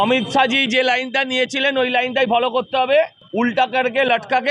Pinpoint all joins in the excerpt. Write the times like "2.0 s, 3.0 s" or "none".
3.2 s